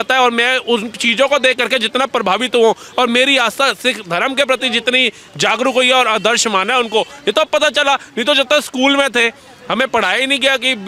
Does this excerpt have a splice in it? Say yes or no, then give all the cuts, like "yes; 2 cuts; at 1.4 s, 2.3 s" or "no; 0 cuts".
no; 0 cuts